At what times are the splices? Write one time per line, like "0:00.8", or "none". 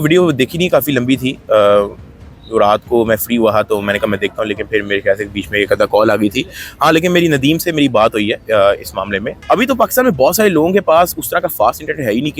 0:09.3